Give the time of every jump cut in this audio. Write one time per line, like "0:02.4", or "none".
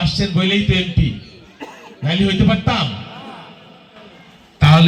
none